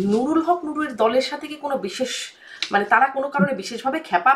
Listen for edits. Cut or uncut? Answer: uncut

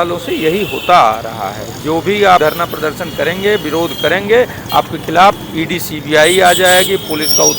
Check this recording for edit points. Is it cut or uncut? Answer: cut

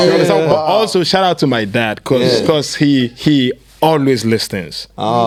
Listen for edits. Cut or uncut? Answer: uncut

